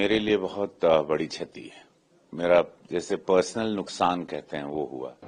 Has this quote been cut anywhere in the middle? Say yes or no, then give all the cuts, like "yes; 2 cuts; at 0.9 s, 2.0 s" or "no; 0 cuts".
no; 0 cuts